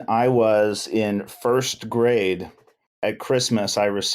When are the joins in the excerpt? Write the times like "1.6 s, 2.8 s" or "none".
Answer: 3.0 s